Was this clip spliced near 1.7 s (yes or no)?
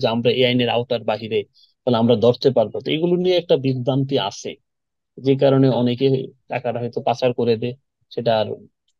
no